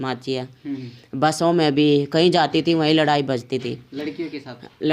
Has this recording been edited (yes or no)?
no